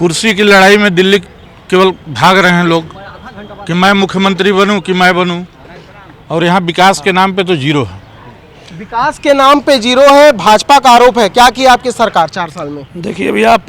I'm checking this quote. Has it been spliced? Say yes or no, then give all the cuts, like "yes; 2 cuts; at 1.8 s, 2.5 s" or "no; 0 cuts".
no; 0 cuts